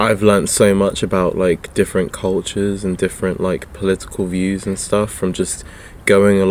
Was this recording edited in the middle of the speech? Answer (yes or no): no